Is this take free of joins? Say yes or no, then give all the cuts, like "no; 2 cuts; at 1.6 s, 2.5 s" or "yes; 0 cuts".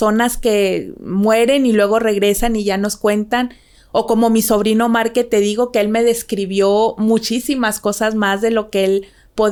yes; 0 cuts